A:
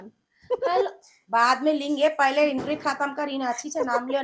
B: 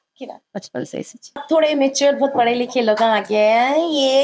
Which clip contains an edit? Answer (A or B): B